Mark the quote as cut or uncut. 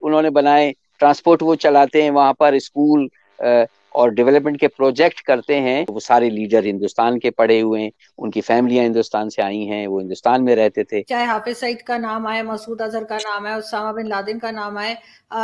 cut